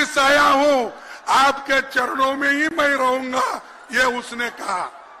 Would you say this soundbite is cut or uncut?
uncut